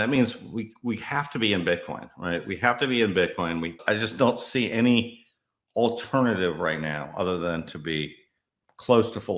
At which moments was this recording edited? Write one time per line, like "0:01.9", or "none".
0:03.8

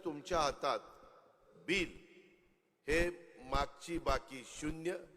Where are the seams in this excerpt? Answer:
0:01.5

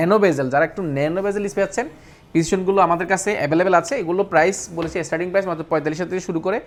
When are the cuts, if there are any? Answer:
none

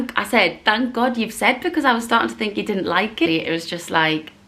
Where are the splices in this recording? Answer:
0:03.3

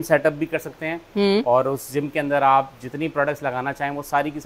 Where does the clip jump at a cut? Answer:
none

